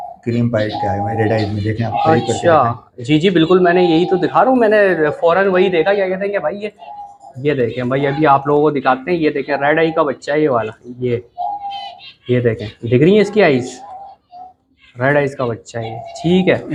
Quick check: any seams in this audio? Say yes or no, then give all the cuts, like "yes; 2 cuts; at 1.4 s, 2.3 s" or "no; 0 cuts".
no; 0 cuts